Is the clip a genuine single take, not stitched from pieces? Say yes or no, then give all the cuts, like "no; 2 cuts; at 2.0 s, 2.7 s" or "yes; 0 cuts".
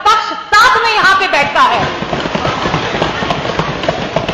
yes; 0 cuts